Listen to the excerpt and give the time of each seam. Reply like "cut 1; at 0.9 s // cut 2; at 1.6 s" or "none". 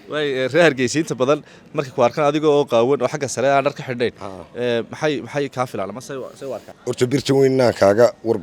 cut 1; at 6.7 s